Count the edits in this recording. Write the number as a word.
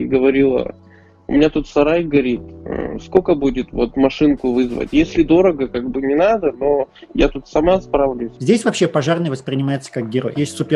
one